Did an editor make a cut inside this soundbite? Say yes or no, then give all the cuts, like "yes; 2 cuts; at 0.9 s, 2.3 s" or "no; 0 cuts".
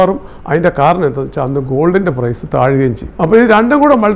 yes; 1 cut; at 3.0 s